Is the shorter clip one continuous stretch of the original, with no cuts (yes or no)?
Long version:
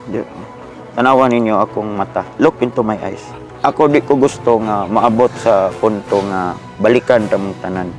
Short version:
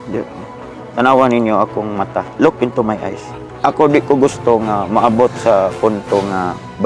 yes